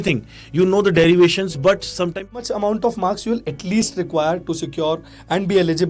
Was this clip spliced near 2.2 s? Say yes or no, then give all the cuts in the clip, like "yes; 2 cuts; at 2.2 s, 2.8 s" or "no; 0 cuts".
yes; 1 cut; at 2.2 s